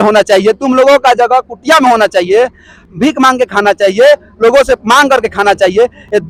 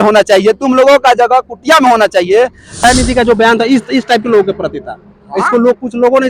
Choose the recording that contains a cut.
second; 1 cut; at 2.8 s

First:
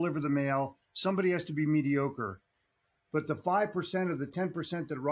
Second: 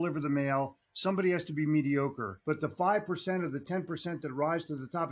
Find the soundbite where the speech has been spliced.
second; 1 cut; at 2.3 s

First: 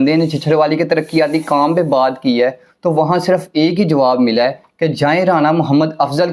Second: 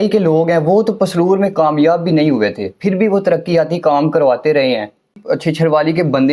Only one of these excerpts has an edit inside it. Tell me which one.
second; 1 cut; at 5.2 s

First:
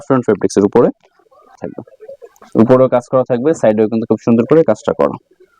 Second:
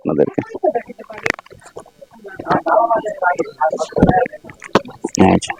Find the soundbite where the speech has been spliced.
first; 1 cut; at 1.6 s

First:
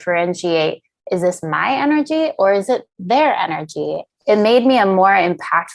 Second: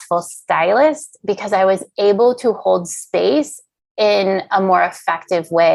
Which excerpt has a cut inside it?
first; 1 cut; at 4.0 s

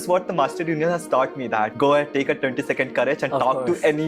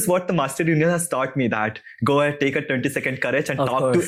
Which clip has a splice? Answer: first; 1 cut; at 1.7 s

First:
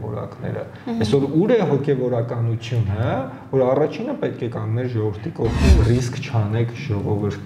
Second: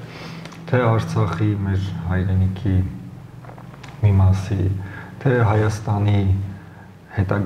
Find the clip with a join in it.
first; 1 cut; at 5.7 s

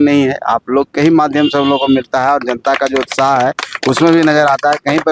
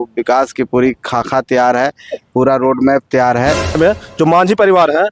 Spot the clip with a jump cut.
second; 1 cut; at 3.8 s

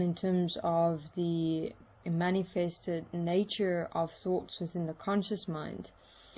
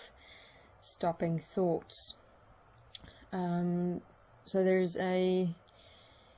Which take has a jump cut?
first; 1 cut; at 2.0 s

